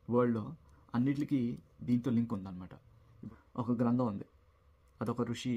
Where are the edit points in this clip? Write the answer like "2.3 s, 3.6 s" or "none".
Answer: 3.2 s